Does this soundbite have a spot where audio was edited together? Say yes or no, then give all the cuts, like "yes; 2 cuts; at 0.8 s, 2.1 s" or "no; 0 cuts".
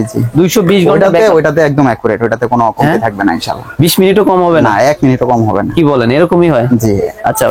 no; 0 cuts